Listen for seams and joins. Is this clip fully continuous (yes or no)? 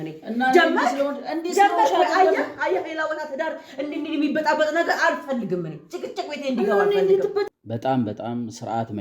no